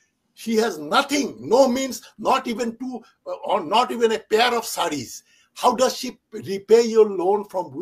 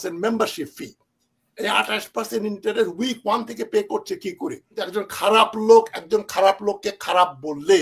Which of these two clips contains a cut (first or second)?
second